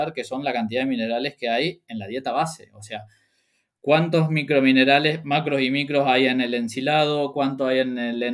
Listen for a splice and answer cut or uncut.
uncut